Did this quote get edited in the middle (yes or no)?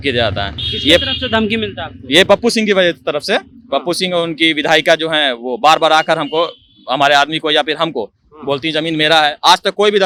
no